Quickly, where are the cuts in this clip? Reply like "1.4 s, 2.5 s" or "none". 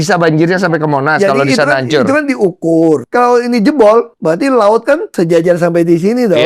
3.0 s, 4.1 s, 5.1 s